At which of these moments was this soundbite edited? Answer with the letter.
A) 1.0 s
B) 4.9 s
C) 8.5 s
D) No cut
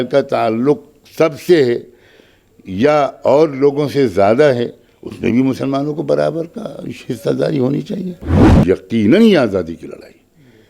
C